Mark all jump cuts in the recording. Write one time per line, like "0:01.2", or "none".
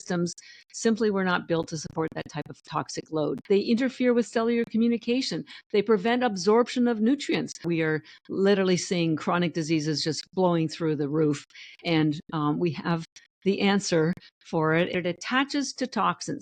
0:03.4
0:07.6
0:14.9